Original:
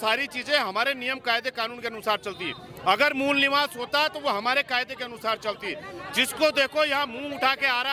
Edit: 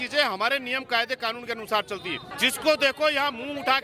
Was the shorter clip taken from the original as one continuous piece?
no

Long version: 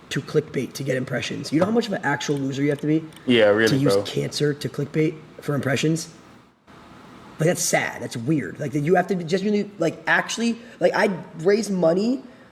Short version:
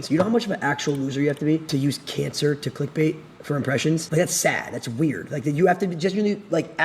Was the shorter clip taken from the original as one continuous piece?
no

